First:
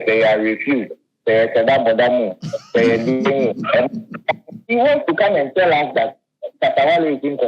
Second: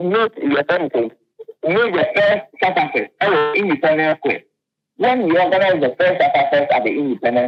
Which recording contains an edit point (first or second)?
first